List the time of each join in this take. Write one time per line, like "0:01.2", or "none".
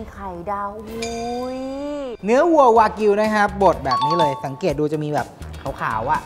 0:02.1

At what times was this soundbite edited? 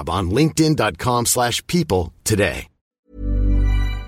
0:02.9

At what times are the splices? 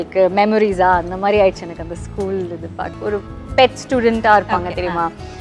0:02.9

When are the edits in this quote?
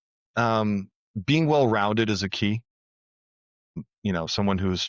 none

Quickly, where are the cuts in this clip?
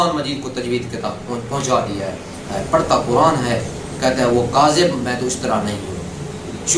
0:02.5

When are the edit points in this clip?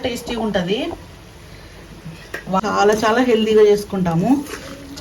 0:02.6

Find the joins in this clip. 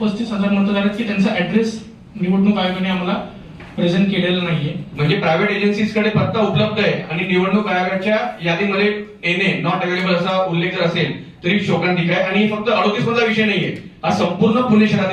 0:04.8

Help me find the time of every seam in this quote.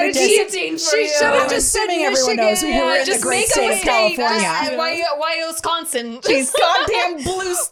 none

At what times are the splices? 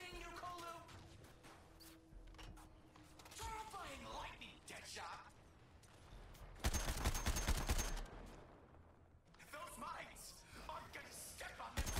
0:09.3

